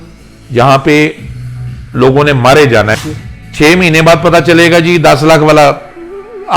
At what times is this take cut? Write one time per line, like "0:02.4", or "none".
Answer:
0:02.9